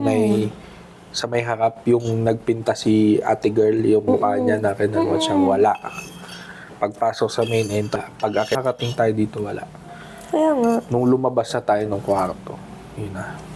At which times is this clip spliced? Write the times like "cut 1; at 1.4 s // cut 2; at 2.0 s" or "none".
cut 1; at 8.2 s